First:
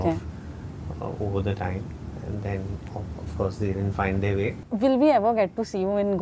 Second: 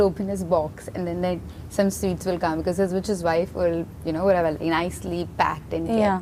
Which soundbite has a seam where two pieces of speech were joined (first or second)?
first